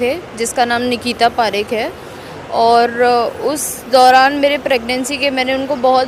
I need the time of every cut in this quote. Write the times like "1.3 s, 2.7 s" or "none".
none